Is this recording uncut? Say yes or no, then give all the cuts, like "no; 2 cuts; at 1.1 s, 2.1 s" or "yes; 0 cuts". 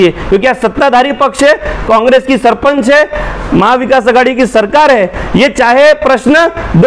yes; 0 cuts